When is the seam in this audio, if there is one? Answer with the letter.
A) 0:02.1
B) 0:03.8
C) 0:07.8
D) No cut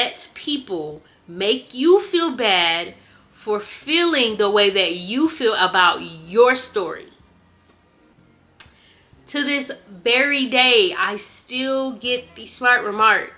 D